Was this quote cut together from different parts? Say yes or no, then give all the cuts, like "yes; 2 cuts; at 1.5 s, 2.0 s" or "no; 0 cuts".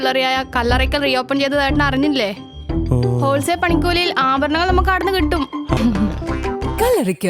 yes; 1 cut; at 5.8 s